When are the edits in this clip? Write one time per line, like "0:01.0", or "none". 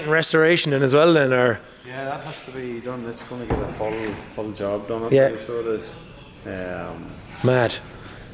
none